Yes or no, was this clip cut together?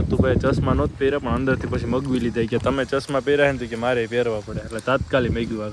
no